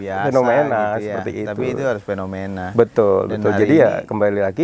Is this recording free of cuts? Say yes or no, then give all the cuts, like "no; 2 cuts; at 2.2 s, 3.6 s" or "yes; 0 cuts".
yes; 0 cuts